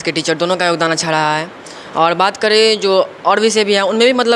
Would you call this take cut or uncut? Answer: uncut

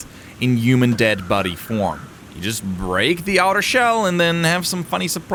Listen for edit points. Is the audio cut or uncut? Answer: uncut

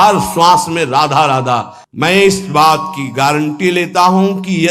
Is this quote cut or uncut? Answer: cut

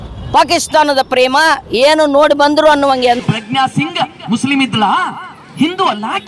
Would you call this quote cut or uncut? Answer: cut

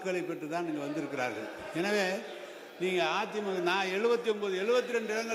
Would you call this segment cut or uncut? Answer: uncut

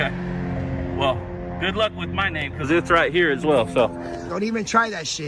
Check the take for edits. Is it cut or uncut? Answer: cut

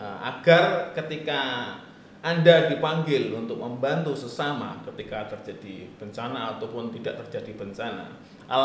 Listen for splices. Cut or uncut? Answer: uncut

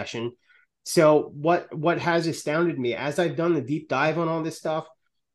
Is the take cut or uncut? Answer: uncut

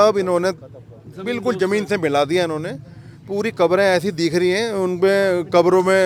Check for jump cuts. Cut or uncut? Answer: uncut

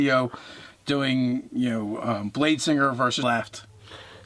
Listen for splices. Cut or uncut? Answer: uncut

